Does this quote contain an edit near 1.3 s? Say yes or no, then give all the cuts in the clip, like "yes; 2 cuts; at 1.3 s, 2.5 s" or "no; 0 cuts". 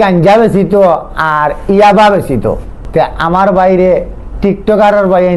no; 1 cut; at 2.7 s